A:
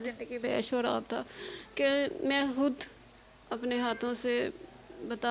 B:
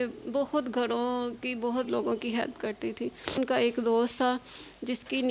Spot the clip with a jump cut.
B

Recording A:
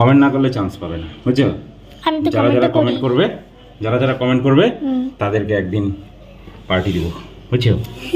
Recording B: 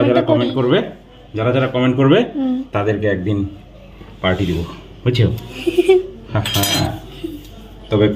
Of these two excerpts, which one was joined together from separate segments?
B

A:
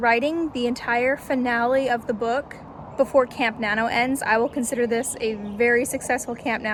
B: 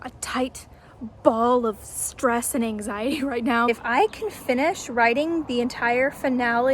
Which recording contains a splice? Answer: B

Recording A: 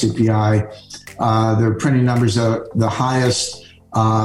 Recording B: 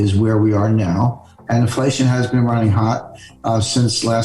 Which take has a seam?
B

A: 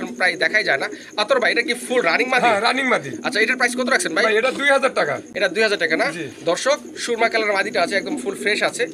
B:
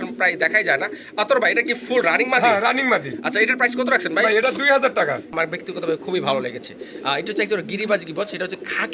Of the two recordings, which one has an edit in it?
B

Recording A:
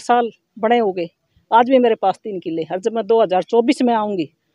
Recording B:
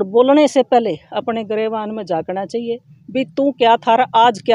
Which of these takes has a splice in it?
B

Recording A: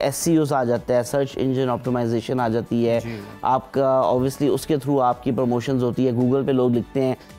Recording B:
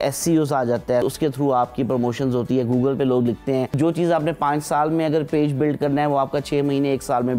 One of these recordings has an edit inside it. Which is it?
B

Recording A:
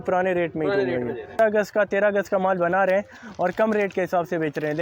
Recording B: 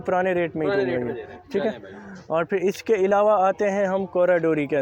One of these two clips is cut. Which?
A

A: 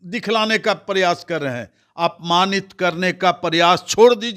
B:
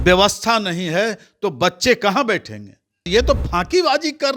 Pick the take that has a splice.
B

